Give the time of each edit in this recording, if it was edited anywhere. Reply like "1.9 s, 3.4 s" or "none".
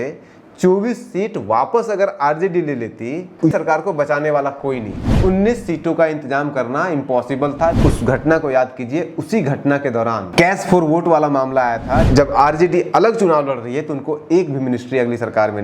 3.5 s, 5.0 s, 7.8 s, 10.3 s, 12.1 s